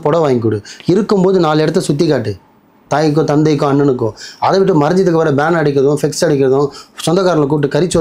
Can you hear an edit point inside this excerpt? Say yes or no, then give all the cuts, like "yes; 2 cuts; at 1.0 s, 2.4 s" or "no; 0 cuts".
no; 0 cuts